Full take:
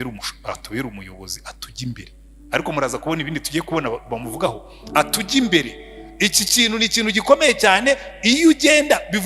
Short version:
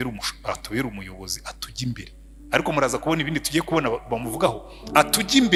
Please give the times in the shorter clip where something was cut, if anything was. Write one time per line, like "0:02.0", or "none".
none